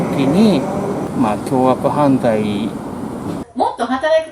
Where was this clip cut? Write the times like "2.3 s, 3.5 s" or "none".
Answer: 1.0 s, 3.4 s